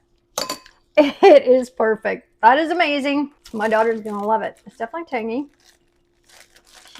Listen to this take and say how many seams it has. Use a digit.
1